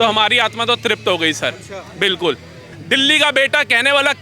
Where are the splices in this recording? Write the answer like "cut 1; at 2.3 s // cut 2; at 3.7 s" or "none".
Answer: cut 1; at 2.6 s